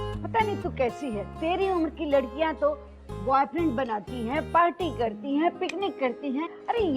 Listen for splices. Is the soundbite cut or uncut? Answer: cut